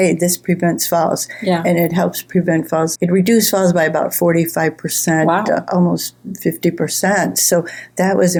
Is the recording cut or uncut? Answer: uncut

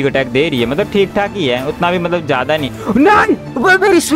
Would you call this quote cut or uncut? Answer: uncut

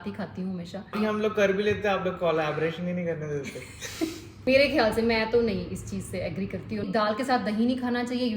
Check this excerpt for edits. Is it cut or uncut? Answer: cut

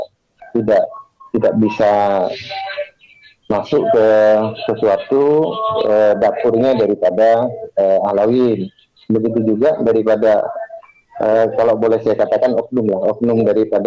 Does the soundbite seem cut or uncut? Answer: uncut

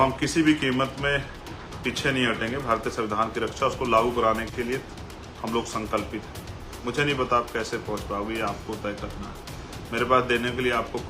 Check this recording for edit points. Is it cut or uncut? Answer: cut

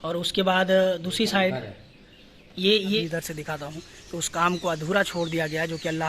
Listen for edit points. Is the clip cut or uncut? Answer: cut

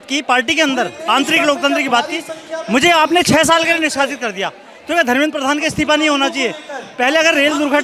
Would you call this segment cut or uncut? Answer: uncut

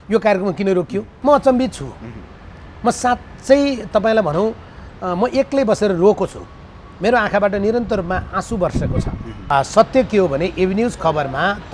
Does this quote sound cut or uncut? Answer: cut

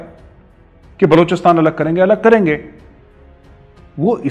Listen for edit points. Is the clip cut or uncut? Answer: uncut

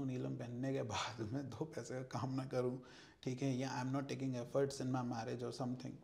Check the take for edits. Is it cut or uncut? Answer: uncut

